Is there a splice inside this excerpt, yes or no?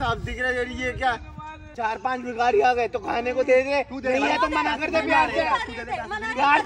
yes